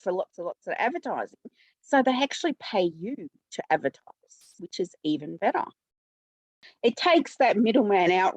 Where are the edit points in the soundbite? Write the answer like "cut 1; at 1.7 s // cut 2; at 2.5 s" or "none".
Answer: cut 1; at 6.7 s

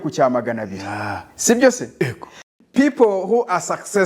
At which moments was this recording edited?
cut 1; at 2.4 s

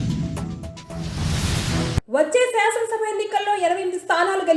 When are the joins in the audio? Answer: cut 1; at 2.0 s

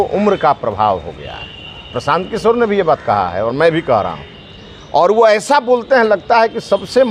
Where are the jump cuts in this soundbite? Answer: none

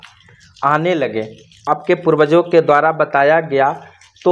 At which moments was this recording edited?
cut 1; at 1.6 s

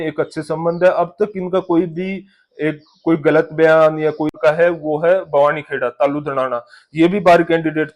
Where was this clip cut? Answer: cut 1; at 4.3 s

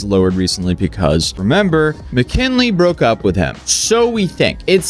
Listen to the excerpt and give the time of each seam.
cut 1; at 1.3 s

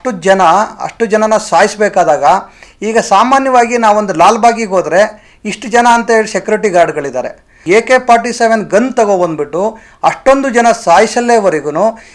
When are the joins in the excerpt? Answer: cut 1; at 7.6 s

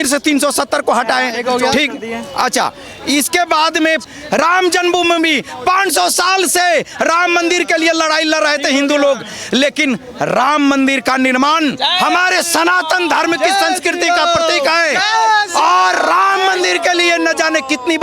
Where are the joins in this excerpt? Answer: cut 1; at 4.0 s

